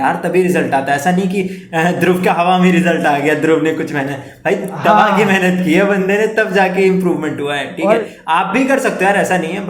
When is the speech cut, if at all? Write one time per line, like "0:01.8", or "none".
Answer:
none